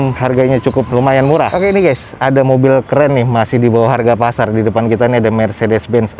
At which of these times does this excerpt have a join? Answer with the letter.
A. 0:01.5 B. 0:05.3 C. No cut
A